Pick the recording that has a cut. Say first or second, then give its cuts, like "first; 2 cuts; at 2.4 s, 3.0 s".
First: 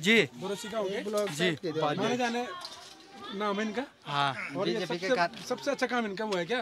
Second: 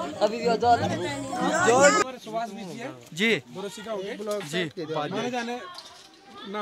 second; 1 cut; at 2.0 s